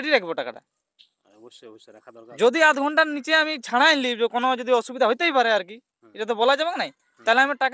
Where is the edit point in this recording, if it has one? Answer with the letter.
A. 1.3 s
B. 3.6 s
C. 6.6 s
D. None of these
D